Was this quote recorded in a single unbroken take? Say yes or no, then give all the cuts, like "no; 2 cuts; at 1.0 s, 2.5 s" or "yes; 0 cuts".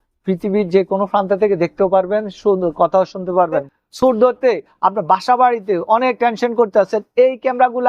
no; 1 cut; at 3.6 s